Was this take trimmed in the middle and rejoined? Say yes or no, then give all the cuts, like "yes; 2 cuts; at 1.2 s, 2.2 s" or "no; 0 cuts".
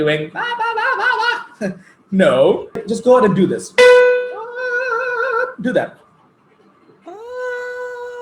yes; 1 cut; at 2.9 s